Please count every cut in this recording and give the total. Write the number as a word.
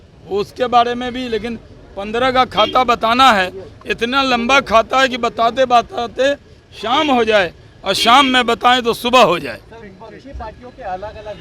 zero